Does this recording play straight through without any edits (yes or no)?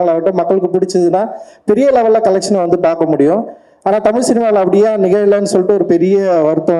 yes